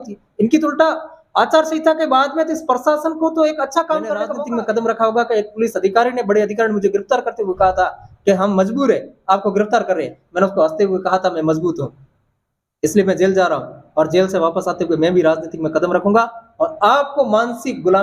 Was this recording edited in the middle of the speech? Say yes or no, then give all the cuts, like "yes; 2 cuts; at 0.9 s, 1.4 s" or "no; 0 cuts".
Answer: yes; 1 cut; at 4.3 s